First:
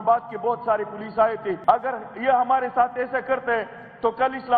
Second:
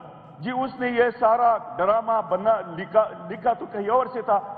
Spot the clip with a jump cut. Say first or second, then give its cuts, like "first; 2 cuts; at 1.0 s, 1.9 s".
first; 1 cut; at 1.6 s